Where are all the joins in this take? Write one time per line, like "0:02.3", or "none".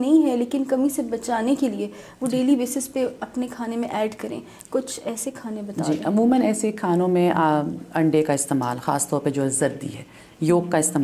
none

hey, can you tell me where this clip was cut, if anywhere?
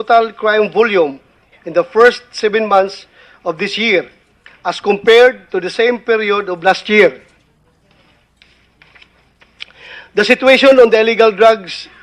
0:05.1

